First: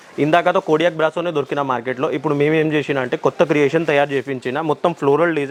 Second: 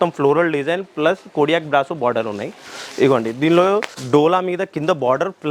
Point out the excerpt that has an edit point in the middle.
second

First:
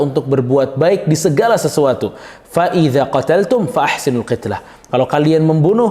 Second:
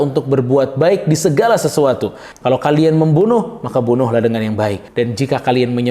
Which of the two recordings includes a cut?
second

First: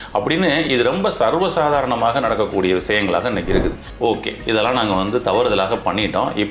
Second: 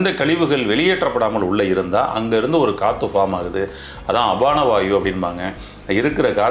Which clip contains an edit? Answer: first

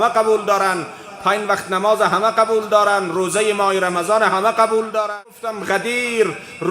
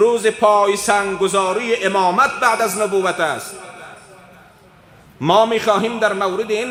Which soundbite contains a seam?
first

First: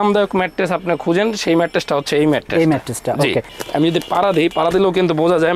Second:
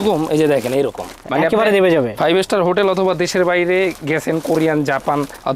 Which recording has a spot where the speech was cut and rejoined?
first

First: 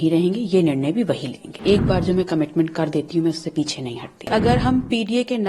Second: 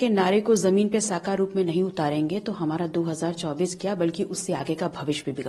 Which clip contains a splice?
first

